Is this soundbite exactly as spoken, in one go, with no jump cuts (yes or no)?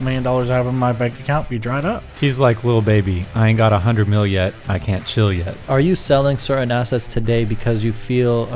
no